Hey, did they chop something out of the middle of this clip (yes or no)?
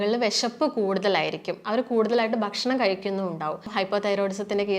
yes